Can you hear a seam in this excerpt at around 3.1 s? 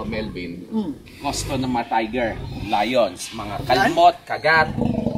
no; 1 cut; at 1.1 s

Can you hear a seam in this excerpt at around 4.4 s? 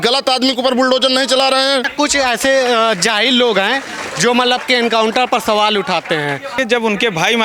no; 2 cuts; at 1.9 s, 6.6 s

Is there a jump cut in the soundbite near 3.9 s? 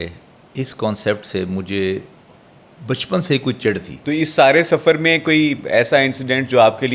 yes; 1 cut; at 3.9 s

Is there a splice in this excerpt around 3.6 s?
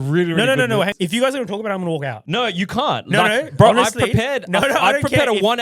no; 2 cuts; at 0.9 s, 2.2 s

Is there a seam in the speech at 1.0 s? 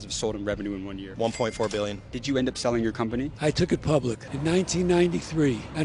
yes; 2 cuts; at 1.0 s, 2.1 s

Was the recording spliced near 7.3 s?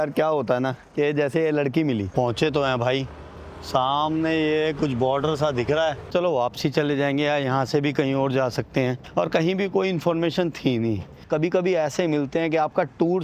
no; 4 cuts; at 2.1 s, 6.1 s, 9.0 s, 11.2 s

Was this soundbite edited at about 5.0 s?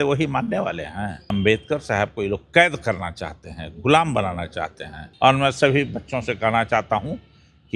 yes; 2 cuts; at 1.3 s, 5.0 s

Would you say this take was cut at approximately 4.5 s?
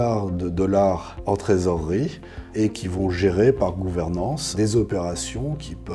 yes; 2 cuts; at 1.1 s, 4.5 s

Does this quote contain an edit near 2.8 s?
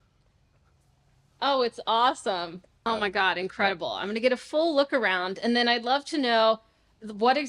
yes; 1 cut; at 2.8 s

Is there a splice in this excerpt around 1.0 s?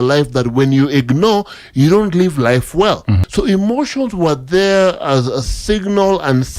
no; 1 cut; at 3.2 s

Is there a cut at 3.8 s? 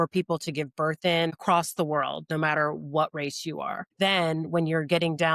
yes; 2 cuts; at 1.4 s, 3.8 s

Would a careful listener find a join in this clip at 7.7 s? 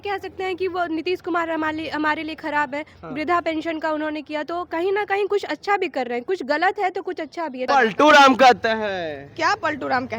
yes; 1 cut; at 7.7 s

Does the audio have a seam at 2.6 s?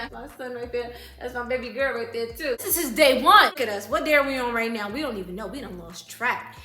yes; 2 cuts; at 2.6 s, 3.6 s

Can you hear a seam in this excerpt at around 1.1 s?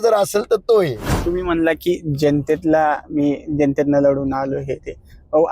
yes; 1 cut; at 1.1 s

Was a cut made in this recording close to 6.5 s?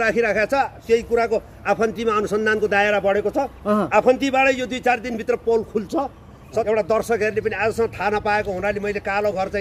yes; 1 cut; at 6.5 s

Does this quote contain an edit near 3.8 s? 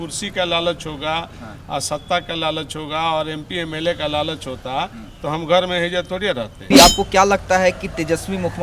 no; 1 cut; at 6.7 s

